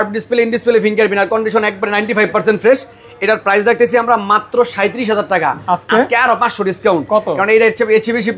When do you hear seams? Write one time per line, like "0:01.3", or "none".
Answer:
none

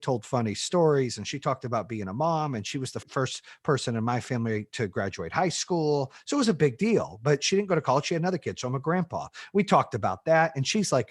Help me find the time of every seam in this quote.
0:03.0

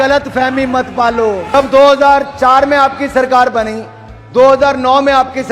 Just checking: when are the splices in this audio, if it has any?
0:01.5

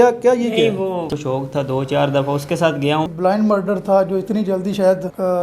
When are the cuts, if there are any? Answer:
0:01.1
0:03.1

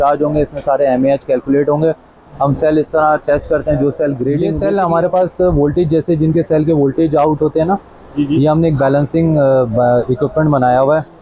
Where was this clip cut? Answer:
0:04.5

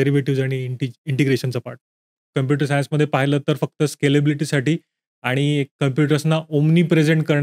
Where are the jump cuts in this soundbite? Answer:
0:02.2

